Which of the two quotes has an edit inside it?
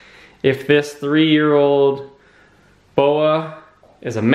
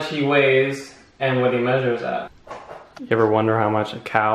second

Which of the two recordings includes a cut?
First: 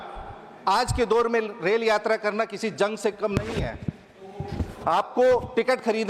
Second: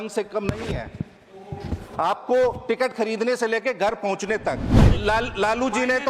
second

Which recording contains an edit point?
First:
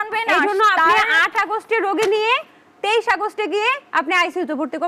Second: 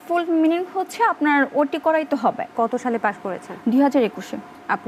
second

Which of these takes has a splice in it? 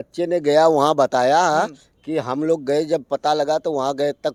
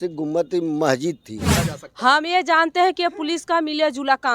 second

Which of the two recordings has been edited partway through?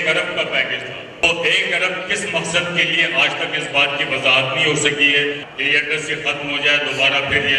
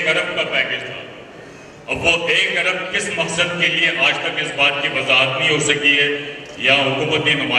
first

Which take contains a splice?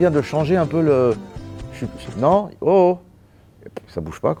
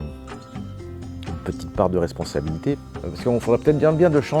second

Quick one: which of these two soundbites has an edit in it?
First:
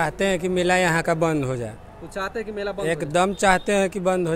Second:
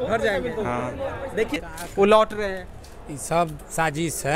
second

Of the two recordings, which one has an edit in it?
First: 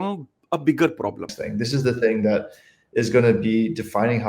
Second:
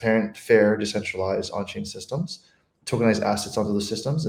first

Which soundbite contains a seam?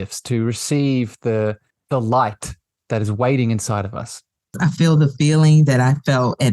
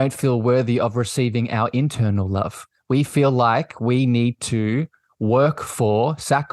first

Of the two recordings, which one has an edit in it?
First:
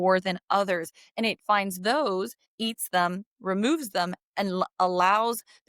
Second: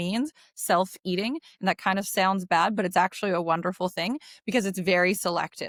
first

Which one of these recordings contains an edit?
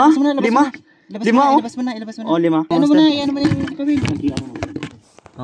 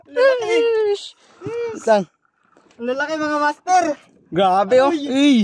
first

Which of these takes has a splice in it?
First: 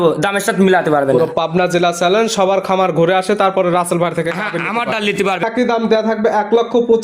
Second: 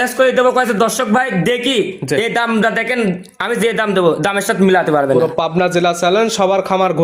first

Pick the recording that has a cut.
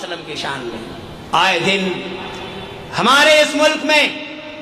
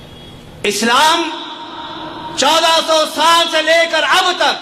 first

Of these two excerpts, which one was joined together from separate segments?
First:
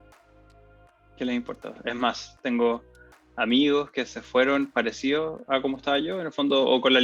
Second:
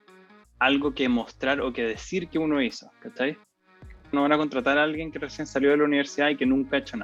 second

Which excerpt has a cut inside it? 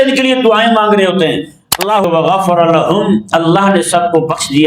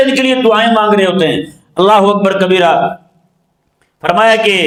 first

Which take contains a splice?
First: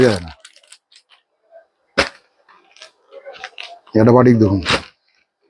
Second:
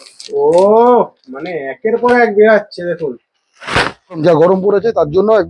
second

